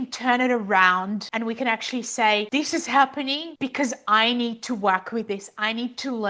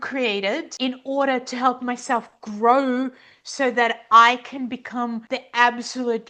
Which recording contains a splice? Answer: first; 1 cut; at 1.3 s

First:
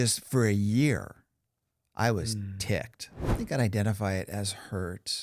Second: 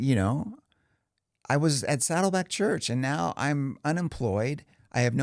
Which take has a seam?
first; 1 cut; at 3.4 s

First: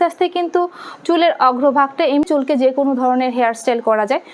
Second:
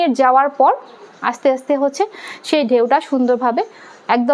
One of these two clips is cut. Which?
first; 1 cut; at 2.3 s

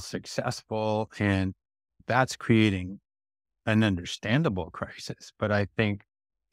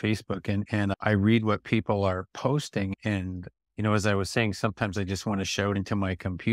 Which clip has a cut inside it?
second; 1 cut; at 0.9 s

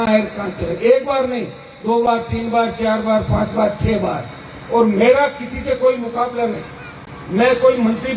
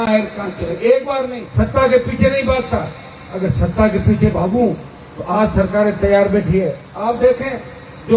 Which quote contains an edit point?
second; 2 cuts; at 1.4 s, 6.8 s

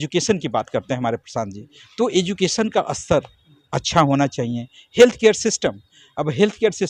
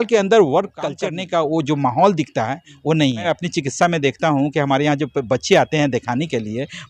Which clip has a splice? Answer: second; 2 cuts; at 0.9 s, 3.3 s

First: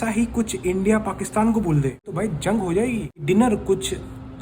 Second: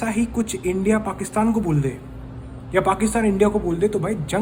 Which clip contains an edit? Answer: first; 2 cuts; at 2.1 s, 3.1 s

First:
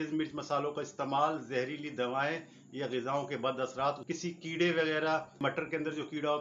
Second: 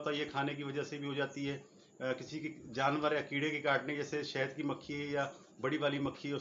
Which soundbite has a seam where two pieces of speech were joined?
first; 2 cuts; at 4.0 s, 5.4 s

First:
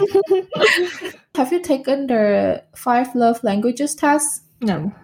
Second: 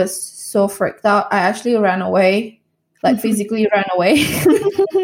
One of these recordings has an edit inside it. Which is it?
first; 1 cut; at 1.3 s

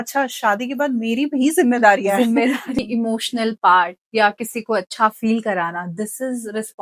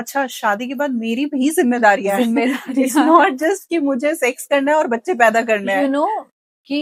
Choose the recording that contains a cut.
first; 1 cut; at 2.7 s

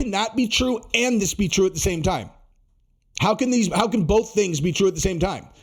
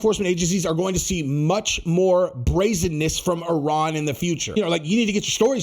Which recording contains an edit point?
second; 1 cut; at 4.6 s

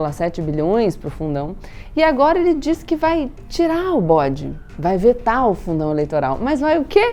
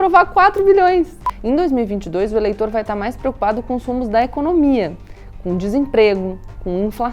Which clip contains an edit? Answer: second; 1 cut; at 1.3 s

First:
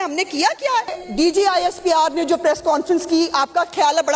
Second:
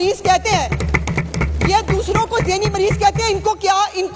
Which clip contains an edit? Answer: first; 1 cut; at 1.0 s

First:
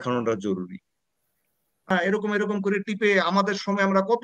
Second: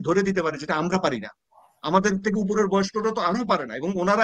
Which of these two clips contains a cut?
first; 1 cut; at 1.9 s

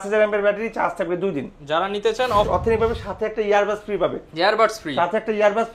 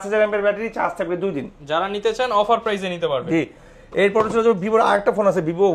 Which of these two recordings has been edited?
first; 1 cut; at 2.5 s

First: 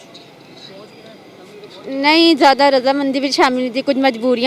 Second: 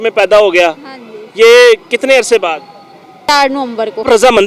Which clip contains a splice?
second; 1 cut; at 3.4 s

